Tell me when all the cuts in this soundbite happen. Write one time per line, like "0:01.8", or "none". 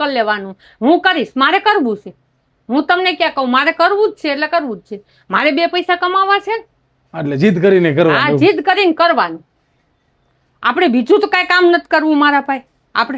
none